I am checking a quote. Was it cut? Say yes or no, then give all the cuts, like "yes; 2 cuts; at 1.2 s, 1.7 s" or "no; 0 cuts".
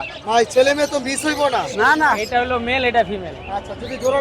yes; 1 cut; at 2.2 s